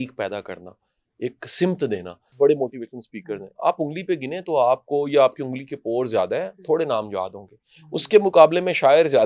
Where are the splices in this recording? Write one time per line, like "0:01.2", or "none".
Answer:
0:02.3